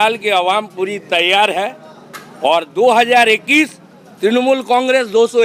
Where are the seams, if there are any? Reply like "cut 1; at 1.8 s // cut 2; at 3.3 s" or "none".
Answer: none